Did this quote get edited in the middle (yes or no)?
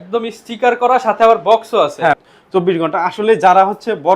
yes